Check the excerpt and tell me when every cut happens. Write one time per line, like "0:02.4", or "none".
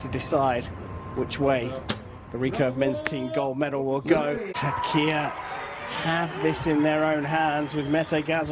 0:04.5